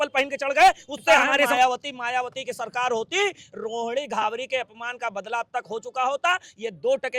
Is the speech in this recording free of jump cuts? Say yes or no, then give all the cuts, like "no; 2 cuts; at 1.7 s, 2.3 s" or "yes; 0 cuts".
no; 1 cut; at 1.5 s